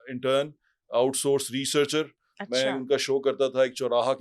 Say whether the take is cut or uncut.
uncut